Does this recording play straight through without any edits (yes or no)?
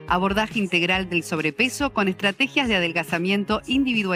yes